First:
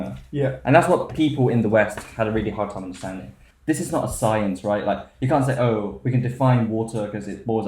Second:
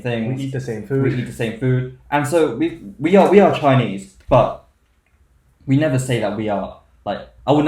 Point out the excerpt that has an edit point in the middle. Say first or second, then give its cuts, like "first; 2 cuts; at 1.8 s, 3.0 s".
first; 1 cut; at 3.5 s